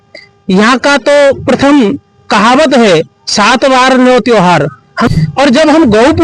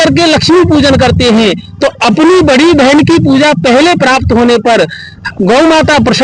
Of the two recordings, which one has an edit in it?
first; 1 cut; at 5.1 s

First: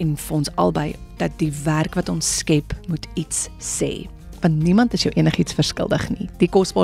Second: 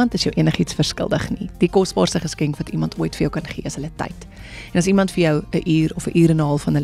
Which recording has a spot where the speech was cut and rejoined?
first; 1 cut; at 1.0 s

